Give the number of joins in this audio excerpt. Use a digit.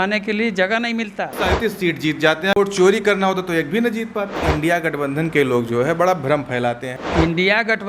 4